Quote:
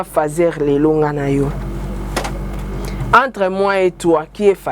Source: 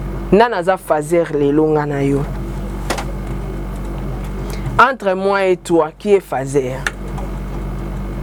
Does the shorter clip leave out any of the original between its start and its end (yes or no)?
yes